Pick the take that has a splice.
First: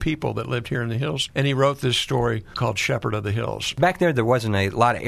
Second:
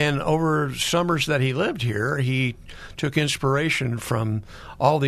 first; 3 cuts; at 1.2 s, 2.5 s, 3.7 s

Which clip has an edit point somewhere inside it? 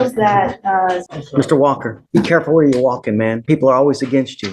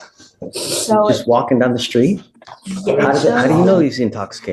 first; 3 cuts; at 1.1 s, 1.9 s, 3.4 s

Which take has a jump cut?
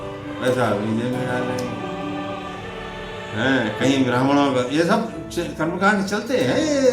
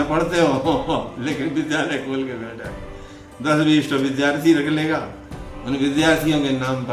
first; 2 cuts; at 1.7 s, 3.1 s

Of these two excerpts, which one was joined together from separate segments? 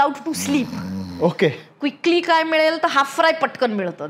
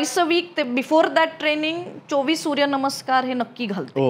first; 1 cut; at 1.7 s

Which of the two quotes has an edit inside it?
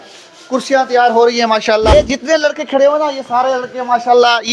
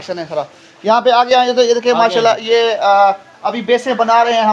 first; 1 cut; at 1.9 s

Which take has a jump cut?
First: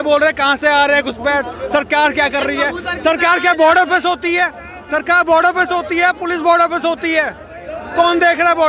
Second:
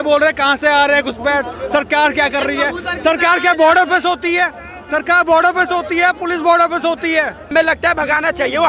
second; 1 cut; at 7.5 s

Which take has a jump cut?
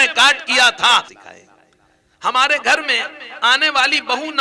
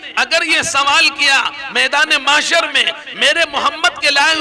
first; 1 cut; at 1.1 s

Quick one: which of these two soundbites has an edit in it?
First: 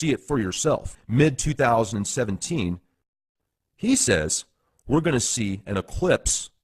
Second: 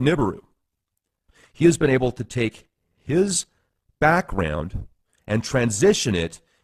first; 1 cut; at 1.0 s

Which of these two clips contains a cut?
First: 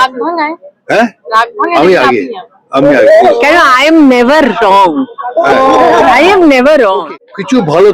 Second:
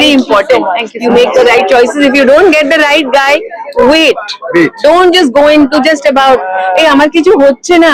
first; 1 cut; at 7.0 s

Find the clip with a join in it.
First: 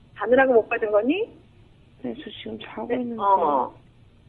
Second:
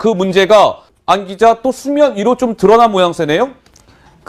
first; 1 cut; at 1.1 s

